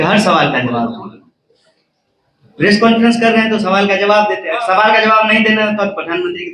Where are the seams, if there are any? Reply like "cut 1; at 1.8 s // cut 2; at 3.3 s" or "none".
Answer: none